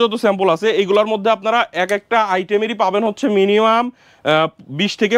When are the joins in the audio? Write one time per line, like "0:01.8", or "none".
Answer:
none